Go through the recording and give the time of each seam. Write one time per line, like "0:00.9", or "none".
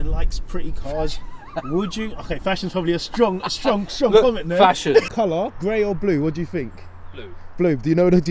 0:05.1